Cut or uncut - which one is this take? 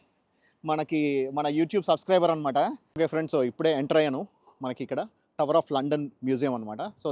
cut